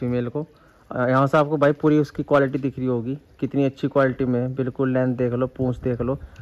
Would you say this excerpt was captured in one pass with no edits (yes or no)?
yes